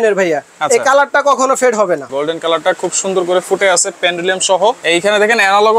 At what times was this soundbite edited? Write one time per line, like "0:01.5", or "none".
0:02.1
0:04.8